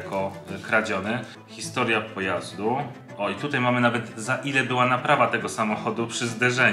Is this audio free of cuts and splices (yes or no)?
no